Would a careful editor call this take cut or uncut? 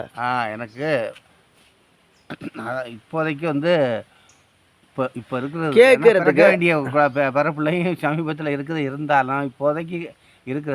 uncut